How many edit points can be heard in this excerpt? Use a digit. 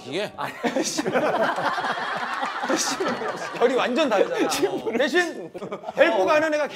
0